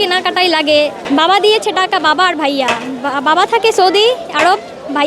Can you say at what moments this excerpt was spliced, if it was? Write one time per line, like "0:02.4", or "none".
0:01.0